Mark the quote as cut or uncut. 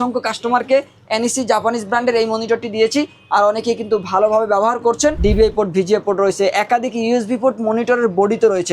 cut